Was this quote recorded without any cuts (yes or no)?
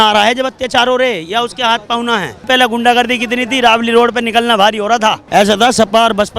no